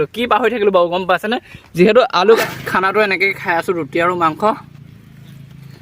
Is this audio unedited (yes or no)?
no